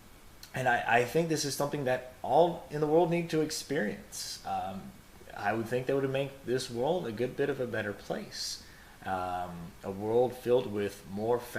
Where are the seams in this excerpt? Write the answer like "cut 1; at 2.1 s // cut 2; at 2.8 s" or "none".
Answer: cut 1; at 10.4 s